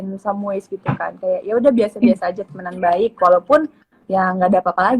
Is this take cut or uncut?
uncut